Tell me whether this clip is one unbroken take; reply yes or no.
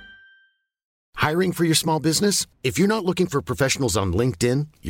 yes